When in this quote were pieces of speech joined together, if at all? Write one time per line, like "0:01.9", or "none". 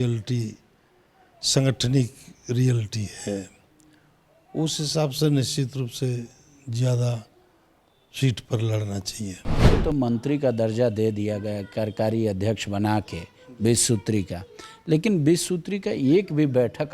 0:09.7